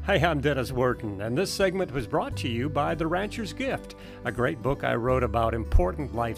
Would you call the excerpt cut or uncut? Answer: uncut